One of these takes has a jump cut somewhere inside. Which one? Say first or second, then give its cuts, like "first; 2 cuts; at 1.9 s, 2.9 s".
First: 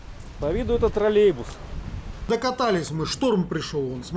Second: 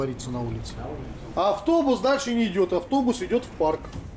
first; 1 cut; at 2.3 s